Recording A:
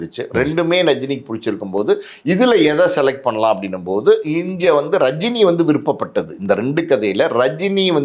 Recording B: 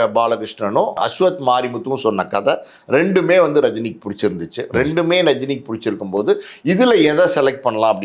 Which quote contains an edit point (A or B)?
B